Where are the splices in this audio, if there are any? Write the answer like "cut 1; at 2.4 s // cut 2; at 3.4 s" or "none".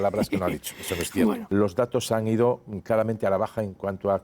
cut 1; at 1.4 s